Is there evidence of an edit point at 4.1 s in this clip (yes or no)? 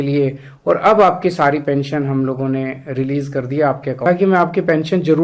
yes